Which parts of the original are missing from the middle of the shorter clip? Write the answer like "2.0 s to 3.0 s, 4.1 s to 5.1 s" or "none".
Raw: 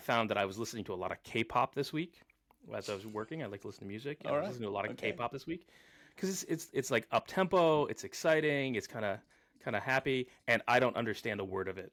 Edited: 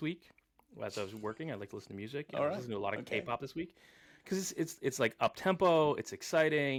none